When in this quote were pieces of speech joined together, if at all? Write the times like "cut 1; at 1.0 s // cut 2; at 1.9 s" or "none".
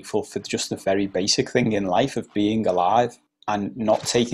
cut 1; at 3.3 s